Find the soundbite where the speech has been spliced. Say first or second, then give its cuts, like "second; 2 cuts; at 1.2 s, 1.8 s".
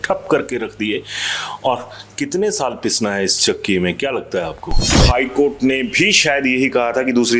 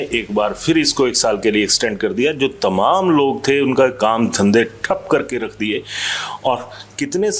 first; 1 cut; at 4.9 s